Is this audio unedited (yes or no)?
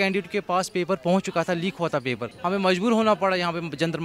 no